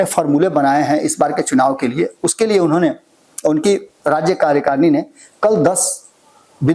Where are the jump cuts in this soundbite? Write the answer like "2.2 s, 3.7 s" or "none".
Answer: none